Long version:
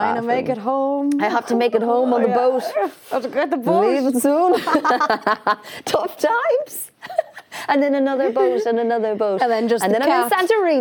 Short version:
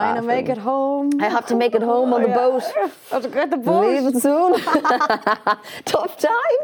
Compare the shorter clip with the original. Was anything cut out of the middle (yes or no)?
no